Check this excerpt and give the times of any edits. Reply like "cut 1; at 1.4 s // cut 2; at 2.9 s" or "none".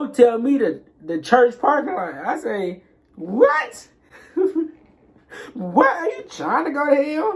none